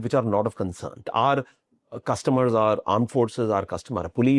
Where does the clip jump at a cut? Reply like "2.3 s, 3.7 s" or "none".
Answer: 1.1 s